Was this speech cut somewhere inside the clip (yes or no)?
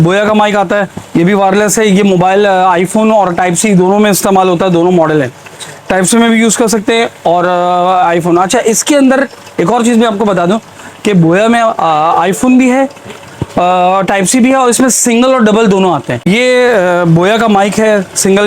yes